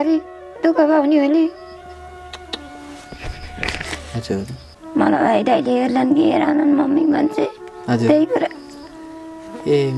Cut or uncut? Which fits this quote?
cut